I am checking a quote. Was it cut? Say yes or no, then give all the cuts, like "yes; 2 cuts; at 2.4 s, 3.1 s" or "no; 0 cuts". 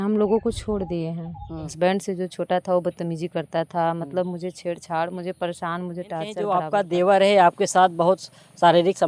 yes; 2 cuts; at 1.7 s, 6.5 s